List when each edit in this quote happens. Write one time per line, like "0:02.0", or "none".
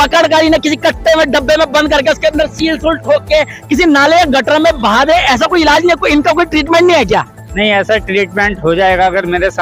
none